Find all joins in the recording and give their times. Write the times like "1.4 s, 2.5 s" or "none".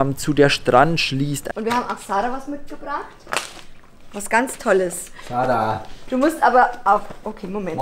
1.4 s